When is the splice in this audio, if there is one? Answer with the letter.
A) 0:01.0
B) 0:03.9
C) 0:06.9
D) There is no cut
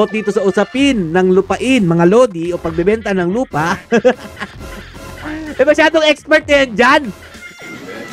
D